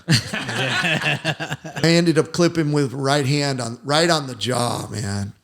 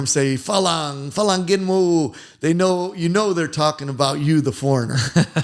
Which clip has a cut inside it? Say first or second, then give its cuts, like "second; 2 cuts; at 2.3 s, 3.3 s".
first; 1 cut; at 1.8 s